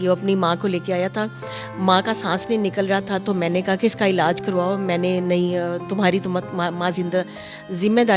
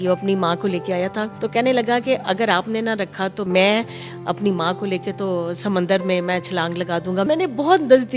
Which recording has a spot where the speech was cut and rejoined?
second; 3 cuts; at 1.3 s, 3.4 s, 7.3 s

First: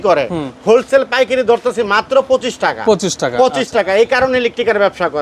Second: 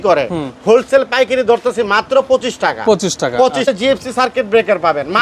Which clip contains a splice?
second; 1 cut; at 3.7 s

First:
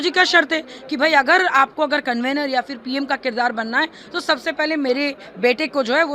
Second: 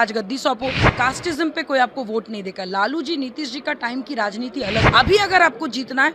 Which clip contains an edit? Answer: second; 2 cuts; at 0.8 s, 4.9 s

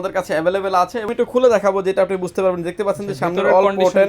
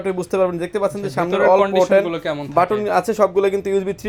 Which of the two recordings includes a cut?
first; 1 cut; at 1.1 s

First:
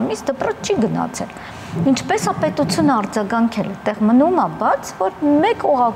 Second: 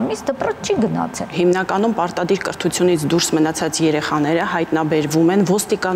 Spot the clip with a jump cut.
second; 1 cut; at 1.3 s

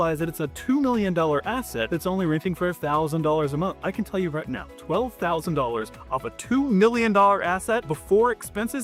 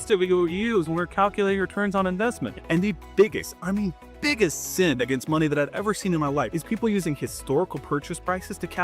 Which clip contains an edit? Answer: second; 1 cut; at 2.5 s

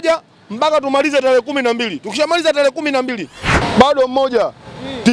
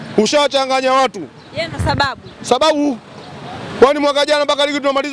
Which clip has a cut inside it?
first; 1 cut; at 3.6 s

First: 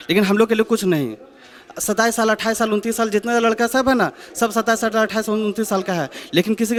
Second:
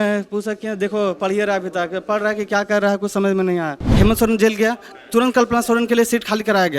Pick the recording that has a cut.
second; 1 cut; at 3.8 s

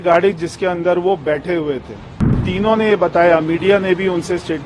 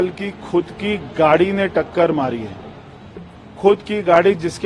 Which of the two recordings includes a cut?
first; 1 cut; at 2.5 s

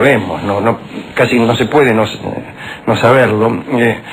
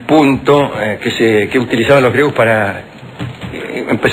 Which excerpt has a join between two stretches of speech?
second; 1 cut; at 3.0 s

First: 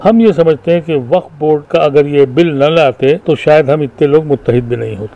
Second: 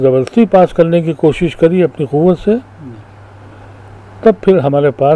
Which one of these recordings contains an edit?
first; 2 cuts; at 1.6 s, 3.2 s

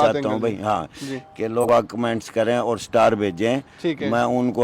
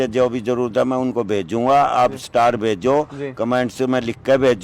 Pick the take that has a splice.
first; 1 cut; at 1.6 s

